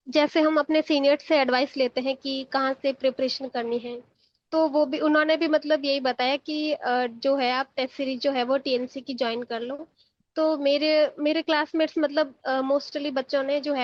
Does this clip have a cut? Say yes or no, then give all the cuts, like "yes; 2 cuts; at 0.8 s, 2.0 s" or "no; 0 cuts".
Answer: no; 0 cuts